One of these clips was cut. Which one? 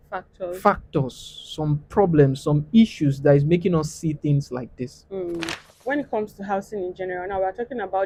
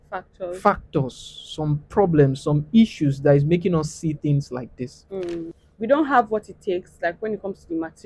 second; 1 cut; at 5.6 s

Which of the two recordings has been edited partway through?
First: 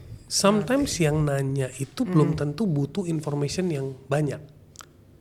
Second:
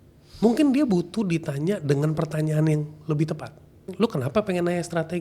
second; 1 cut; at 3.9 s

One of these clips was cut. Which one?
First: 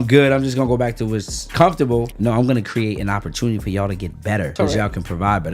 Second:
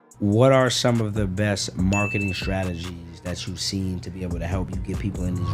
first; 3 cuts; at 1.5 s, 2.1 s, 4.5 s

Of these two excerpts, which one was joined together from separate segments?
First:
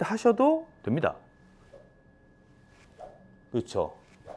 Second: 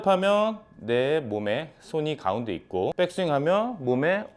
second; 1 cut; at 2.9 s

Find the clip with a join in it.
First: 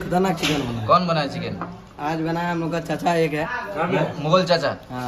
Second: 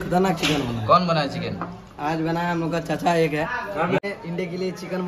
second; 1 cut; at 4.0 s

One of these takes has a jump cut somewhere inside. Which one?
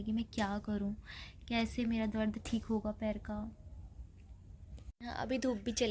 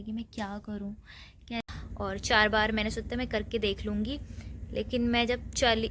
second; 1 cut; at 1.6 s

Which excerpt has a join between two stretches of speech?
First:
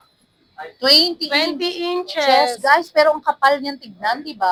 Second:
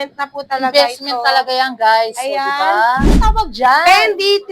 second; 1 cut; at 3.2 s

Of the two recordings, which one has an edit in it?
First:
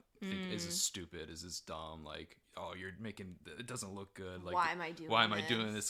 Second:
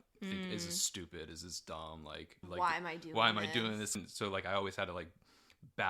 second; 2 cuts; at 2.4 s, 4.0 s

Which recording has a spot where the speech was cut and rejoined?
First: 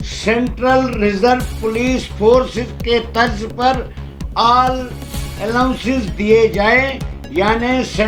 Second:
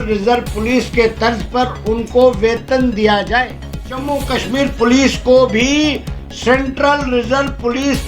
second; 1 cut; at 4.0 s

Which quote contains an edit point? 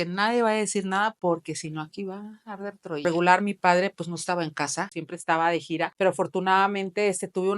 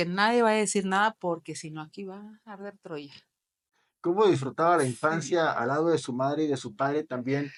first; 3 cuts; at 3.0 s, 5.0 s, 5.9 s

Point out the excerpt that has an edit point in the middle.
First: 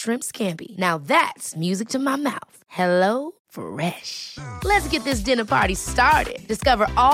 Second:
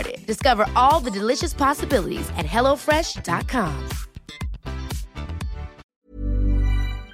second; 1 cut; at 5.8 s

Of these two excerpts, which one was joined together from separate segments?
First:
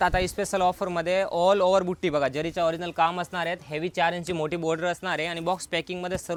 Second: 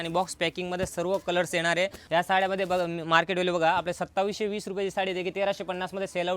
second; 1 cut; at 2.0 s

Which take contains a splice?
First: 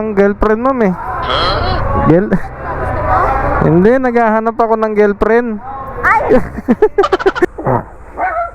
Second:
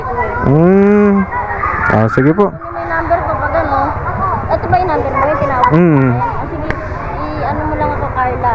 first; 1 cut; at 7.5 s

